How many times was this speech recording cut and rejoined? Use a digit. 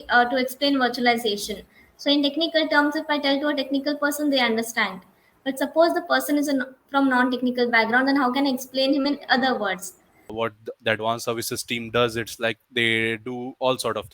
1